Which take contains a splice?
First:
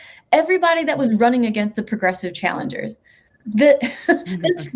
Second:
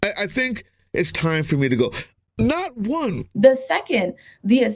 second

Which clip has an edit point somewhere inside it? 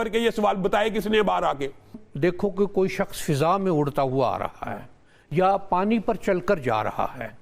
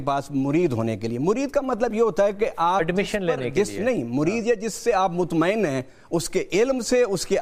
first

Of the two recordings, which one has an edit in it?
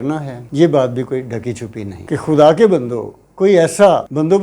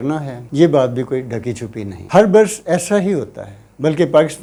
first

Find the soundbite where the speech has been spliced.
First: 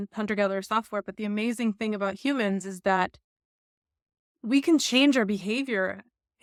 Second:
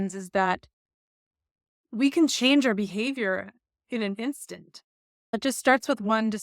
second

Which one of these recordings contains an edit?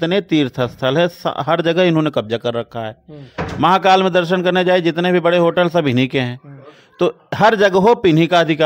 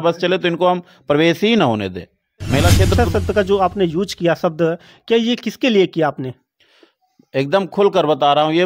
second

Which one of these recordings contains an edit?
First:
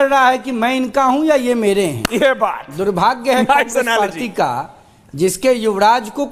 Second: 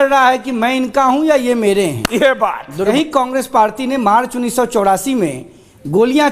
second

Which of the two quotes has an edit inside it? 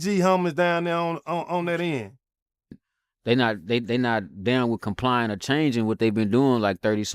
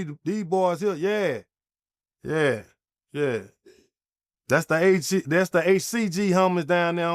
first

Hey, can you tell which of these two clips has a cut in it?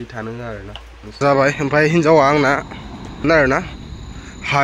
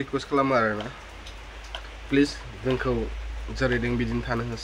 first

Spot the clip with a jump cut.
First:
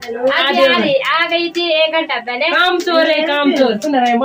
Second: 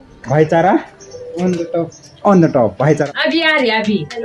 second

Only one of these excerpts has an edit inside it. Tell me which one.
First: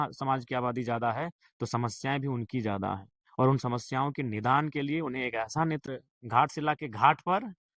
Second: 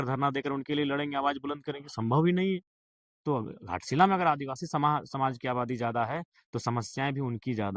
first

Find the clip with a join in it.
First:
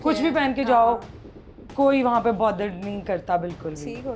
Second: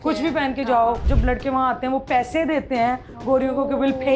second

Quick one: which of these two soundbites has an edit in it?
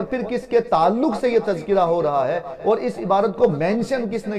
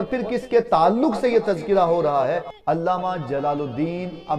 second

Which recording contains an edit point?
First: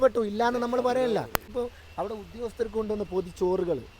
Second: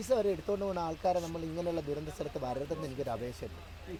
first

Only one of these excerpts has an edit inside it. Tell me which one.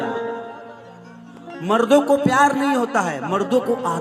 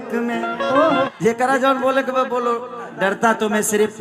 second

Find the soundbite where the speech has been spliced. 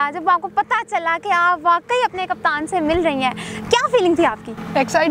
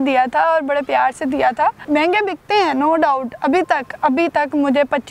second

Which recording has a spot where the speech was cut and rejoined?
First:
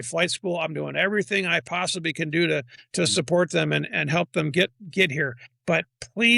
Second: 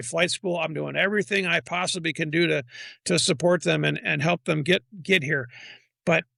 first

